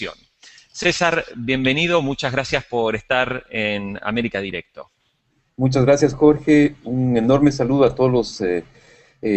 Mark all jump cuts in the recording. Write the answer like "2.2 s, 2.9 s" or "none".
none